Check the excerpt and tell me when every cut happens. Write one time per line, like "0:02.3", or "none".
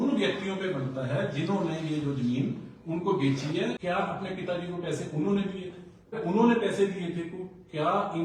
0:03.8
0:06.2